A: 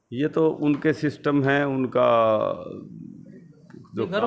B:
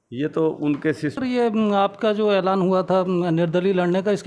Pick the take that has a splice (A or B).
B